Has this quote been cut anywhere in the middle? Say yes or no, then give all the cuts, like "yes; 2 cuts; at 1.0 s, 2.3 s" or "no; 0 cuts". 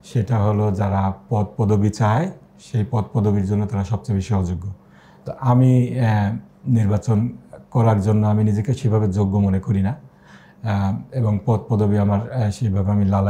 no; 0 cuts